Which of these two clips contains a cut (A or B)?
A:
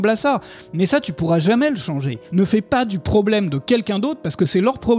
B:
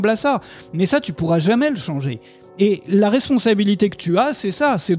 A